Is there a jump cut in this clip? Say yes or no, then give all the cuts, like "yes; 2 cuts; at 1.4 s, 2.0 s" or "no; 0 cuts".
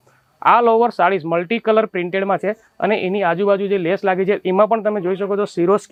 no; 0 cuts